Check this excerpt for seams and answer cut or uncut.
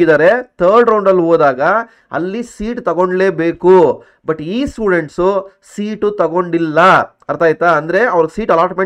uncut